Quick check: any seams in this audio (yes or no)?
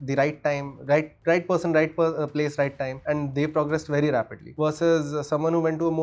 yes